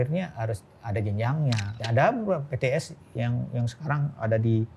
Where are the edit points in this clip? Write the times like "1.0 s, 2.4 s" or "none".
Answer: 1.8 s